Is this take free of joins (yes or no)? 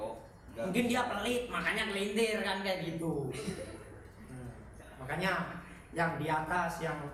yes